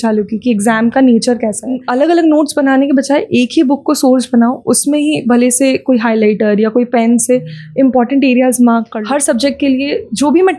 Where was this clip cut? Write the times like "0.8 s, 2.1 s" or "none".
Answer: 1.8 s, 8.9 s